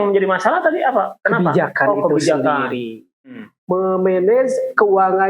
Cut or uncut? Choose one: cut